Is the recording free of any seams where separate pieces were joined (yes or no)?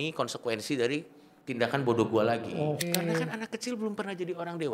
no